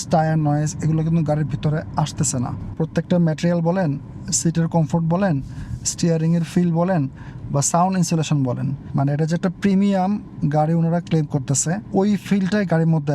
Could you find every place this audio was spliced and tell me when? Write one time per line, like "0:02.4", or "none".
0:02.6
0:08.8
0:11.8